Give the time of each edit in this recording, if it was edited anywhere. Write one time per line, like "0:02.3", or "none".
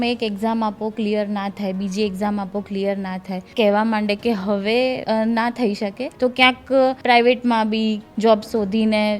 0:03.4
0:05.0
0:06.0
0:07.0